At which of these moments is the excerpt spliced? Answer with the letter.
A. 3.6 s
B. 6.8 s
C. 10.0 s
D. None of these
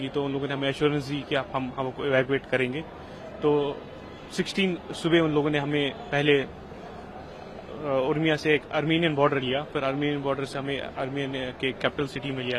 D